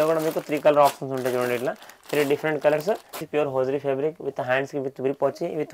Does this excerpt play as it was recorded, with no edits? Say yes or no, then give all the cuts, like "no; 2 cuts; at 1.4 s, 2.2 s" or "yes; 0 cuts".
no; 1 cut; at 3.2 s